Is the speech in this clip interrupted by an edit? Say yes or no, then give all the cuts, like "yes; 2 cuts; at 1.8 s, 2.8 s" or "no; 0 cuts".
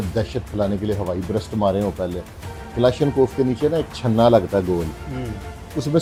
no; 0 cuts